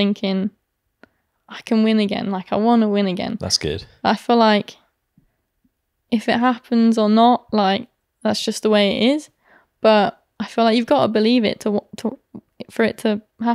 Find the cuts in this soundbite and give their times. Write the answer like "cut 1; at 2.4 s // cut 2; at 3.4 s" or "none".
none